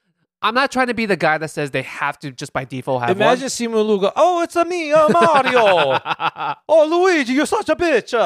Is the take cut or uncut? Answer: uncut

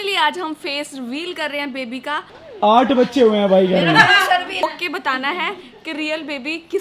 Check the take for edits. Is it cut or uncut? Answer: cut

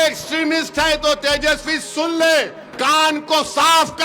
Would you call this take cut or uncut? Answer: cut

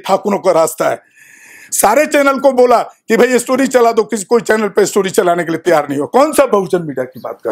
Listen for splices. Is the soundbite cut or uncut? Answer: uncut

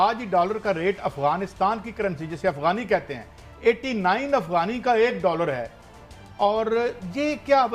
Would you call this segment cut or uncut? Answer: uncut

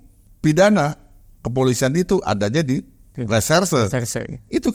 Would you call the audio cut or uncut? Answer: uncut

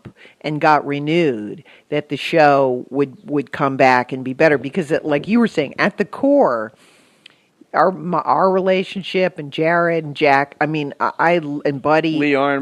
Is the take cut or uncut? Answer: uncut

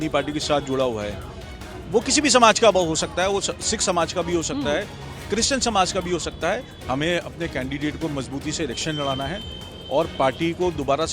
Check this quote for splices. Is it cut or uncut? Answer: cut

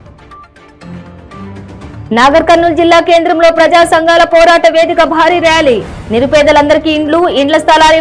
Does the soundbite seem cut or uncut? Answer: uncut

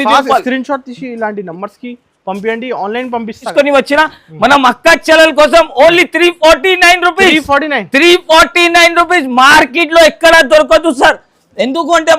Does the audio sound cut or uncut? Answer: cut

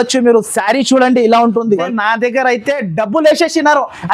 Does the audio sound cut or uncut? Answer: cut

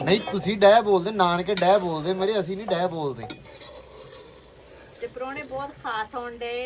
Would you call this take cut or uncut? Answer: uncut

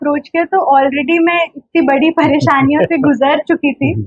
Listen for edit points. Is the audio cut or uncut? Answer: uncut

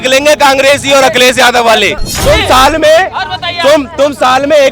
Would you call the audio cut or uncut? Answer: cut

